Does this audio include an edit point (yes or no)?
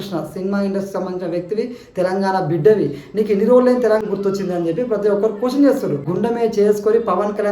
yes